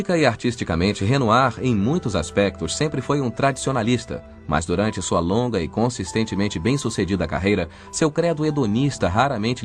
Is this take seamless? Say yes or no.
no